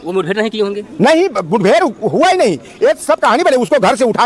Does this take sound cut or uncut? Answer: uncut